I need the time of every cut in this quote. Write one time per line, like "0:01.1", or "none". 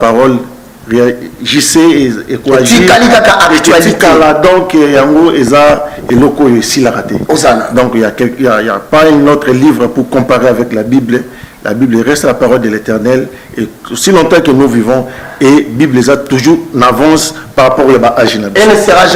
none